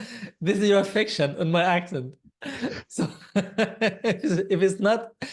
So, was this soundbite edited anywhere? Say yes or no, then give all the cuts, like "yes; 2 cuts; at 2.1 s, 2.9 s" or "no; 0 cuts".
no; 0 cuts